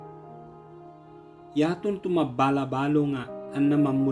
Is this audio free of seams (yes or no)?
no